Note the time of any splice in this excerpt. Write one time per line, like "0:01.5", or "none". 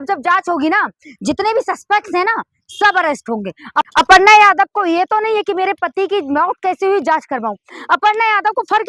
0:03.9